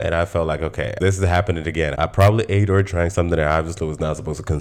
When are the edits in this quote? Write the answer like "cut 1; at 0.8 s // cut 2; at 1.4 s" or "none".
none